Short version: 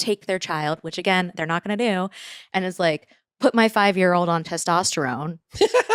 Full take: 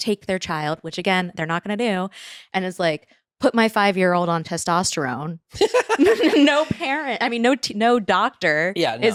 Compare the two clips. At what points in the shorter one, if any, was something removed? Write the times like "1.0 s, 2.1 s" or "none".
none